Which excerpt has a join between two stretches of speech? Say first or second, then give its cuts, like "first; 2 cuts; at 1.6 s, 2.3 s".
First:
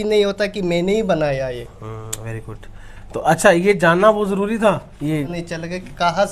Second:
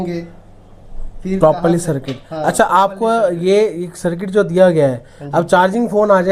first; 1 cut; at 5.4 s